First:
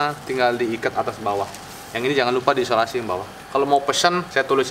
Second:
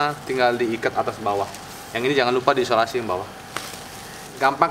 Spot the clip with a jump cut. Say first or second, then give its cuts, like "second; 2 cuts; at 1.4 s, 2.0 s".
first; 1 cut; at 3.3 s